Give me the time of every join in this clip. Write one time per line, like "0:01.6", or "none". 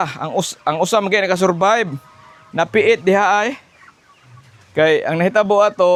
none

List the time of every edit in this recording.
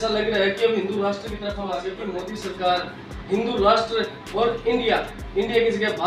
0:01.9

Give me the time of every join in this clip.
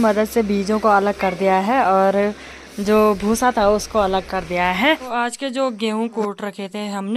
0:05.0

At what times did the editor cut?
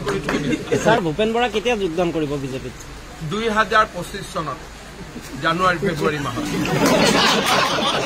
0:01.0

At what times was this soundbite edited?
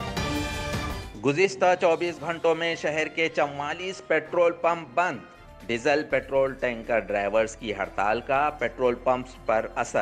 0:01.0

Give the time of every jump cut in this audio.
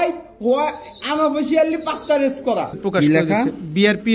0:02.8

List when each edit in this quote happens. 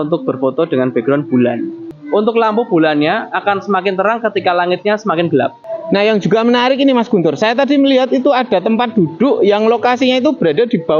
0:01.9
0:05.6

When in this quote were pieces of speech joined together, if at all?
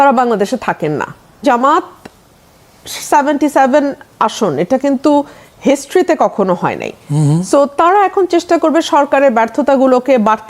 0:01.4

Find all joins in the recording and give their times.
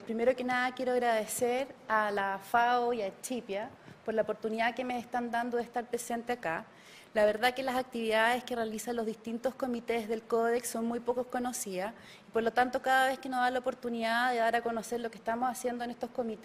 none

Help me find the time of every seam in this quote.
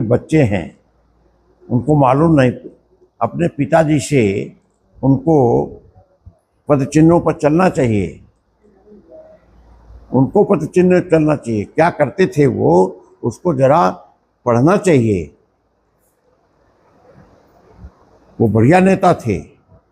none

